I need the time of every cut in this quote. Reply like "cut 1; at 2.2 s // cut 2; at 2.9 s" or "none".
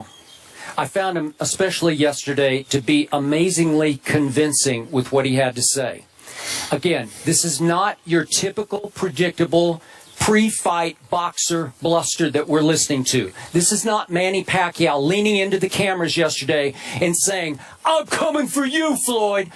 cut 1; at 13.8 s